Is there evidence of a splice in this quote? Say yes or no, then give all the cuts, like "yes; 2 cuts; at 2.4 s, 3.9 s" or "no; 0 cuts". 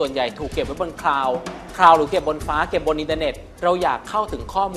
yes; 1 cut; at 3.5 s